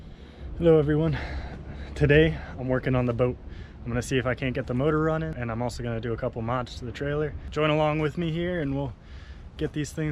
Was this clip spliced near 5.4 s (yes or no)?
yes